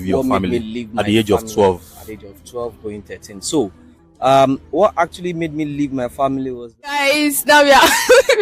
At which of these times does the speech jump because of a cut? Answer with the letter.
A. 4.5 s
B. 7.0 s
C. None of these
B